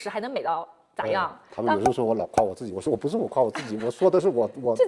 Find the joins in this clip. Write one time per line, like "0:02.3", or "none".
0:01.6